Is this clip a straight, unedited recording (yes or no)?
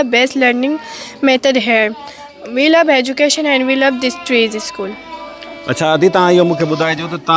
yes